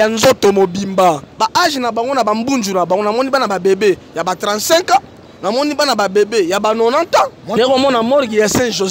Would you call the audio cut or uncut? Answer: cut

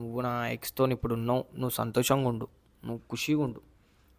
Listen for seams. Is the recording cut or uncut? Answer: uncut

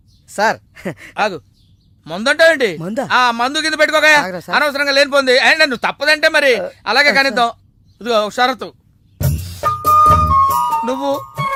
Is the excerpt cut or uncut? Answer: uncut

